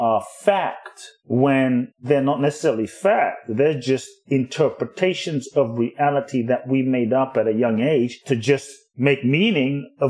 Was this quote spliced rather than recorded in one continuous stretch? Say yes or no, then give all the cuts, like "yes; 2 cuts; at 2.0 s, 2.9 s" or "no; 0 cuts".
yes; 1 cut; at 8.2 s